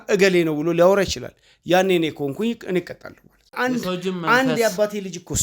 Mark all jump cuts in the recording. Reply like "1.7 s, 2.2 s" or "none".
3.5 s